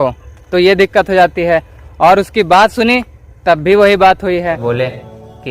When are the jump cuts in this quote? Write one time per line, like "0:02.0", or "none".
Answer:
0:04.6